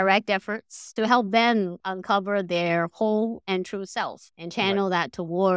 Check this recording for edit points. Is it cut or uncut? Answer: cut